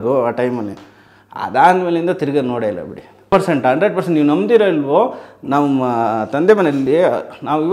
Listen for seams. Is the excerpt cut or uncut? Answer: cut